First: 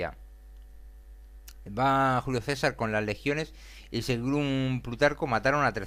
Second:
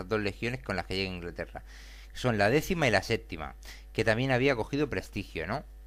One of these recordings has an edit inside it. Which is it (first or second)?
second